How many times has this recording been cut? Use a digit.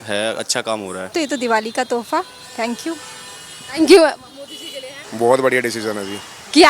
2